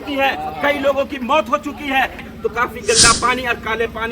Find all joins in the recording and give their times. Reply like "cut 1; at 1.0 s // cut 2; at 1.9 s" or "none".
cut 1; at 2.3 s